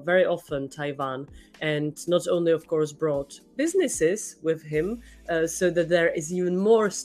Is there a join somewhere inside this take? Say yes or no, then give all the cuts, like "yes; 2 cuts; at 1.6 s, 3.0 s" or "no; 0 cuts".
no; 0 cuts